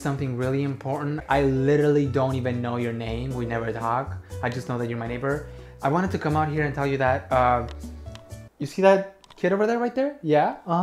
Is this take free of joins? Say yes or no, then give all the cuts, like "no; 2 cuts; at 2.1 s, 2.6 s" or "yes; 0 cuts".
no; 1 cut; at 1.2 s